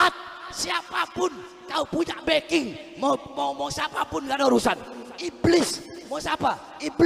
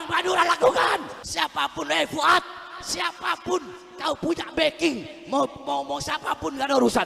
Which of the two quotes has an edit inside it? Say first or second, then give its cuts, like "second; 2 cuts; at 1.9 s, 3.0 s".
second; 1 cut; at 1.2 s